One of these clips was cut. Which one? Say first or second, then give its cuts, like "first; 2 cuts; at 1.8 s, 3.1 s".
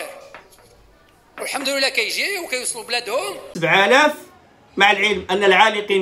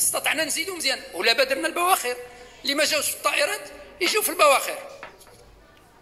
first; 1 cut; at 3.5 s